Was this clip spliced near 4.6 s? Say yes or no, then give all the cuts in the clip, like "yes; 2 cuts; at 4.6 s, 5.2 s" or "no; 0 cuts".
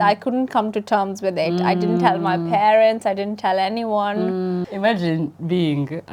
yes; 1 cut; at 4.6 s